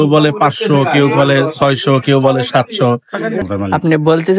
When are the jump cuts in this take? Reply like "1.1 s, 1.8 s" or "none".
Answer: 3.4 s